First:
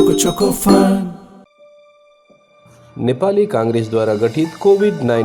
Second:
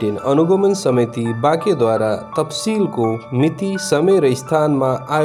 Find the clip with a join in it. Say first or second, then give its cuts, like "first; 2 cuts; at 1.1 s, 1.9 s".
first; 1 cut; at 1.5 s